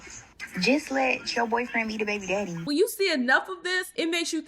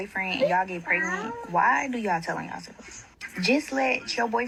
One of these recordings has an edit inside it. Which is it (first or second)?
first